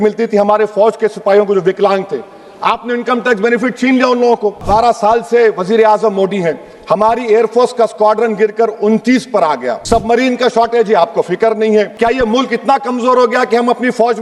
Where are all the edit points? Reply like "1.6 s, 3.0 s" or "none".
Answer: 4.7 s, 9.7 s, 11.9 s